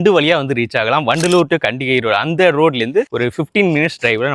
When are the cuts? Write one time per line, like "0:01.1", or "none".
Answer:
none